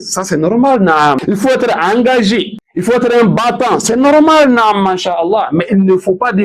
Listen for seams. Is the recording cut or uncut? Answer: cut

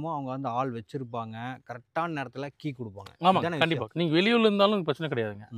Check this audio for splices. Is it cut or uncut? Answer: cut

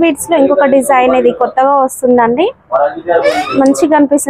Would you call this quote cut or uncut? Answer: uncut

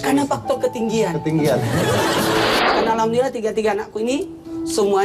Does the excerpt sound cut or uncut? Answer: cut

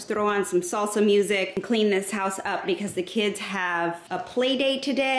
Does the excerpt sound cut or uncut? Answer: cut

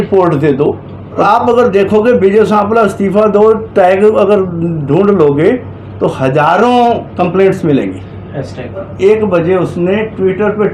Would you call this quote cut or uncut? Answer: cut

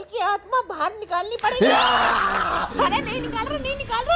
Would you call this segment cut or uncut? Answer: uncut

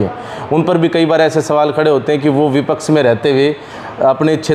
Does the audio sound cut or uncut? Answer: uncut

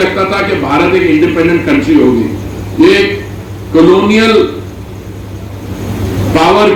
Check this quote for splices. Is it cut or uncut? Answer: uncut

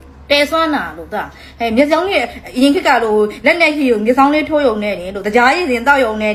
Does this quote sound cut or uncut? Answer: uncut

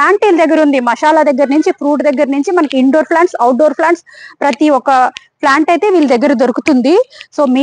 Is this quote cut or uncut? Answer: uncut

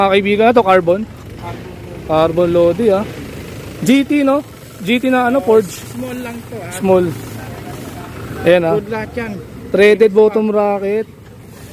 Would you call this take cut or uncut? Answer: uncut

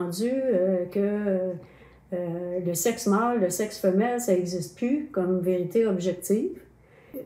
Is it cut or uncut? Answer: uncut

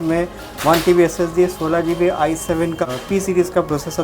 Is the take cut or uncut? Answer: cut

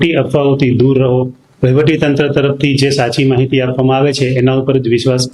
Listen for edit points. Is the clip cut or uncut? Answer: uncut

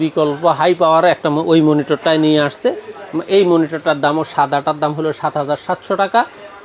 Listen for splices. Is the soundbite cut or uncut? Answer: uncut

